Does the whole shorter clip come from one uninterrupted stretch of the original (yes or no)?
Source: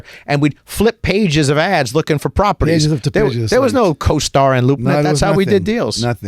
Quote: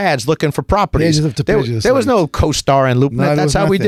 yes